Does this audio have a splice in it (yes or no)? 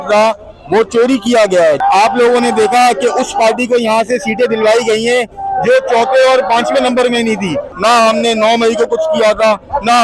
yes